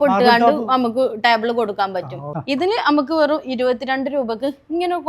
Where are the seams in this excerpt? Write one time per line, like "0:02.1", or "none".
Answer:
0:02.2